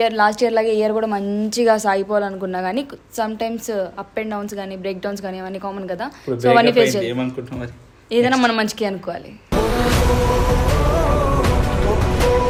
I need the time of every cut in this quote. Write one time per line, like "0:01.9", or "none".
none

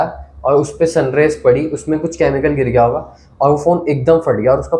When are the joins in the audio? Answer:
none

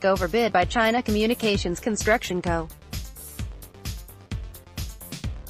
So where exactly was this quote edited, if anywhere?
0:02.8

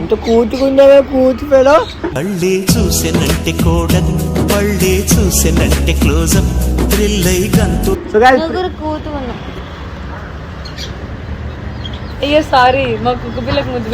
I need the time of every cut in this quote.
none

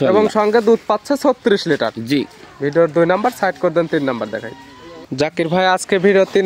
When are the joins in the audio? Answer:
none

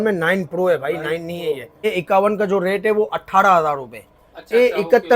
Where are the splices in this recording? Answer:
0:01.7

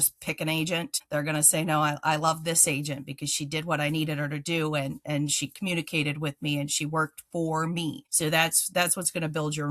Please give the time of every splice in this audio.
0:01.0
0:08.1

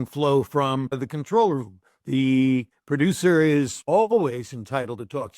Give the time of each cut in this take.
0:01.1
0:02.8
0:03.8

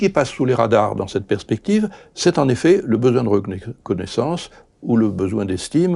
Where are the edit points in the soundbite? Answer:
none

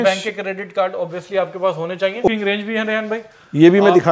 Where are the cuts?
0:02.3

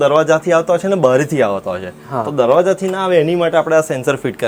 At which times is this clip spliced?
none

